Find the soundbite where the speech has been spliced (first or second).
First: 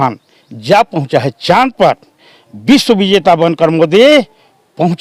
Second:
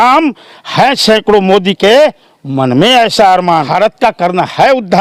second